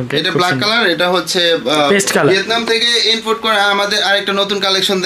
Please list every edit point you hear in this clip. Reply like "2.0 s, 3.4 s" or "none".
2.3 s